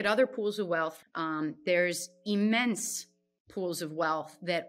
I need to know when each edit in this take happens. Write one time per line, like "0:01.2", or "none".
0:01.0